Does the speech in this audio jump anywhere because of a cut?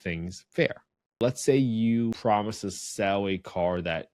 yes; 2 cuts; at 1.2 s, 2.2 s

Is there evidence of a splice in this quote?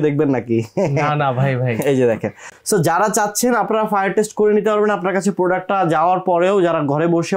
no; 0 cuts

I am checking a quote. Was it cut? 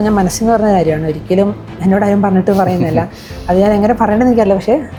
no; 0 cuts

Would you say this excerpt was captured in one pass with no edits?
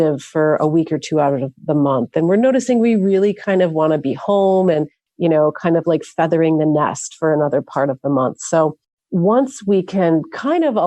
yes; 0 cuts

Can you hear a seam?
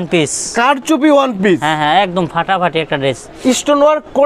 no; 0 cuts

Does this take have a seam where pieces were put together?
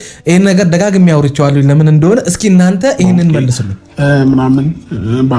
yes; 1 cut; at 3.8 s

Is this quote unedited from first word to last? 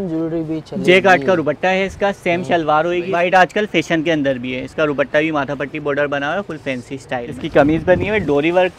no; 2 cuts; at 3.1 s, 7.3 s

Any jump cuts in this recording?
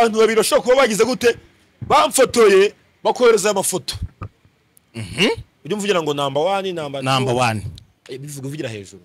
no; 0 cuts

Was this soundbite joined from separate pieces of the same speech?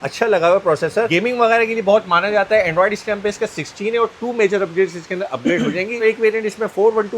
yes; 1 cut; at 6.0 s

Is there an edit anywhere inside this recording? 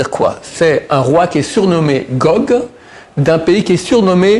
no; 0 cuts

